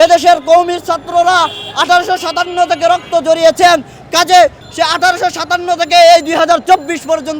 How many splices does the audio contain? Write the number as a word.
one